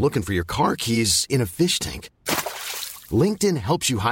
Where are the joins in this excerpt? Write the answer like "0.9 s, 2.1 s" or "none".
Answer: none